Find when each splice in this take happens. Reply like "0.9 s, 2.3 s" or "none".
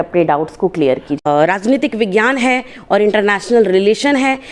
1.2 s